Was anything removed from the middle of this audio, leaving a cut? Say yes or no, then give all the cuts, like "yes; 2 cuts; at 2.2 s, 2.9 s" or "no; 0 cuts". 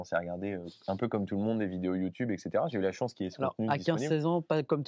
no; 0 cuts